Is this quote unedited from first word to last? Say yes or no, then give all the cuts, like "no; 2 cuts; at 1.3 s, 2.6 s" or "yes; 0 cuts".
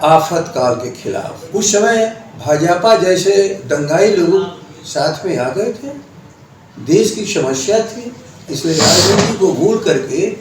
no; 1 cut; at 1.4 s